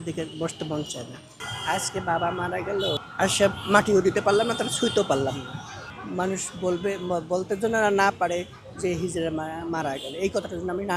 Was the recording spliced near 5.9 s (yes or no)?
yes